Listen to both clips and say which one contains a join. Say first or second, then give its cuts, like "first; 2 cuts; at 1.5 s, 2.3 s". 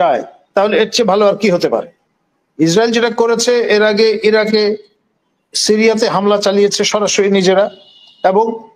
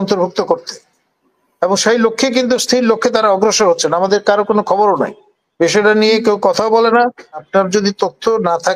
second; 1 cut; at 7.4 s